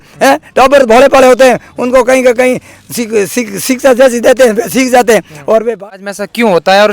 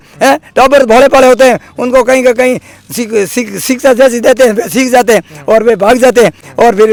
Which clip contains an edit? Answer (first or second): first